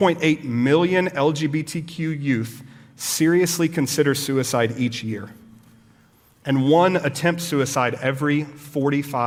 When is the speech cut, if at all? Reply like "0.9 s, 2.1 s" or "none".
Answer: none